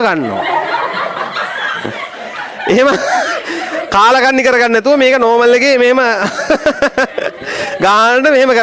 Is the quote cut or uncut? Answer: uncut